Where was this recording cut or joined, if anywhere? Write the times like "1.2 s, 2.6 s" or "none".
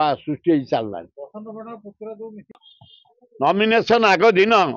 none